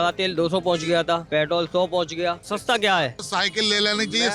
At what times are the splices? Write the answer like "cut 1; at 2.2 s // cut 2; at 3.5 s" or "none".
cut 1; at 1.2 s // cut 2; at 2.4 s // cut 3; at 3.2 s